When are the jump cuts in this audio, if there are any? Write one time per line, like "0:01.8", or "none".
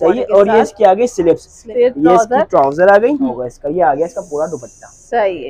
0:01.5
0:03.4